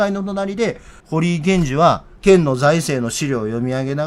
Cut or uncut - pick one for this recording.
cut